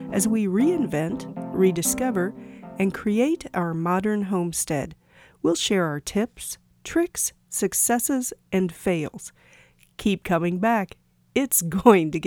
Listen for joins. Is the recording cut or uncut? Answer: uncut